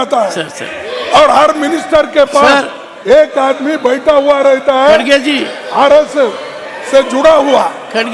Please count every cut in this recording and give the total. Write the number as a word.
zero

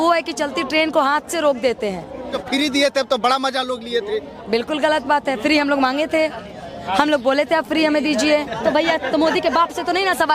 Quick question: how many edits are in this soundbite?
two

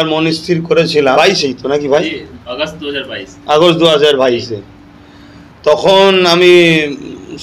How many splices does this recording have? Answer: one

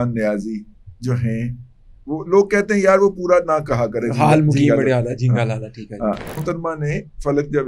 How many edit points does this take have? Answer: one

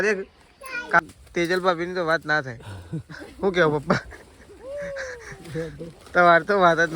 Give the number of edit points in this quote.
one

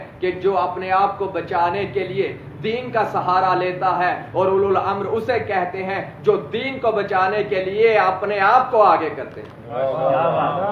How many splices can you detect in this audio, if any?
zero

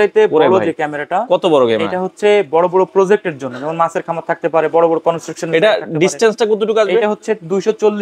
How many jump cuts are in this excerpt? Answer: zero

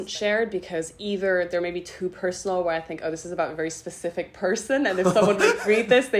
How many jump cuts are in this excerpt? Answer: zero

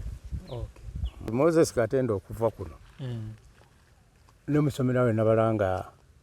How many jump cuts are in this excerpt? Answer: one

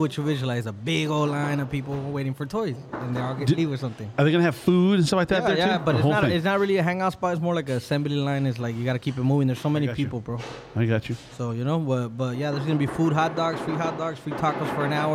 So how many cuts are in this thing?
zero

